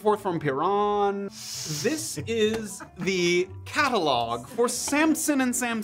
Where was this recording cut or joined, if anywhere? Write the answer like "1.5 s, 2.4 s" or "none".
1.3 s